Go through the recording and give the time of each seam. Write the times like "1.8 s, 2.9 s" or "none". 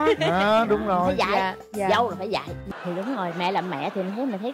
2.6 s